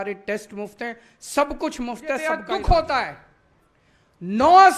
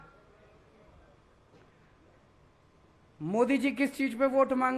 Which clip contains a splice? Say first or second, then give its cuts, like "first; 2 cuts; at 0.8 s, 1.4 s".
first; 1 cut; at 2.2 s